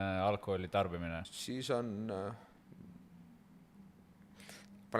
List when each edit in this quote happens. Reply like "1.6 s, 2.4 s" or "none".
1.3 s